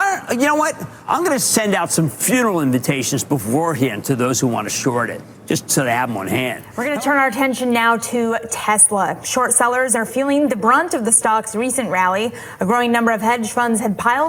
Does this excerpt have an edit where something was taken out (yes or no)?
no